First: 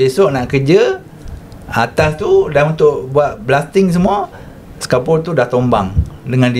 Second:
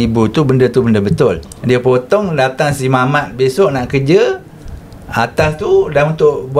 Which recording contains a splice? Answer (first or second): second